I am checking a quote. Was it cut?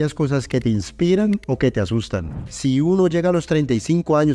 no; 0 cuts

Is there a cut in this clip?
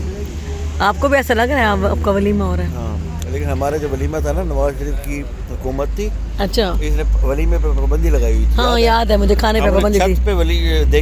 no; 0 cuts

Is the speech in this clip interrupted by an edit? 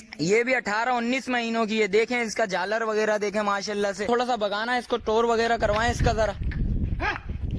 yes; 1 cut; at 4.1 s

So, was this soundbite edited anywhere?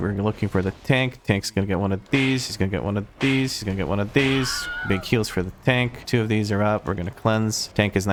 no; 0 cuts

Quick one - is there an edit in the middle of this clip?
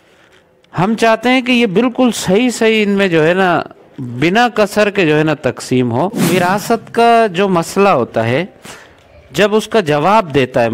yes; 1 cut; at 6.2 s

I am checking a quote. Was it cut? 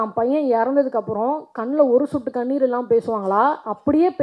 no; 0 cuts

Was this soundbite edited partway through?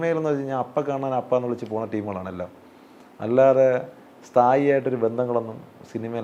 no; 0 cuts

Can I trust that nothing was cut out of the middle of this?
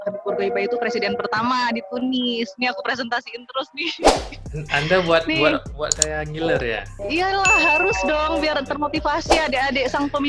yes; 0 cuts

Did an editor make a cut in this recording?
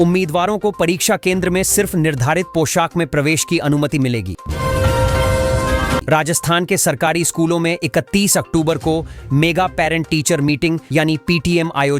yes; 2 cuts; at 4.4 s, 6.0 s

